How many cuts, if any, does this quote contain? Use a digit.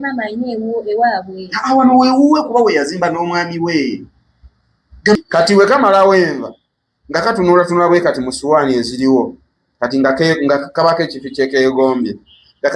1